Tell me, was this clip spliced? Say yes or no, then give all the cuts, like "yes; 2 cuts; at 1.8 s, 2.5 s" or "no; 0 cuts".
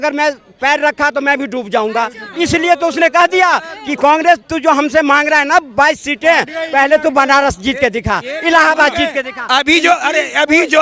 no; 0 cuts